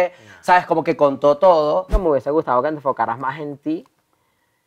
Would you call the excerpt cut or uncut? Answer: cut